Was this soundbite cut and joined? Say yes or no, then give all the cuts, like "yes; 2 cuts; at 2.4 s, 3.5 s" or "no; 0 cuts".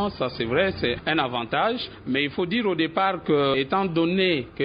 no; 0 cuts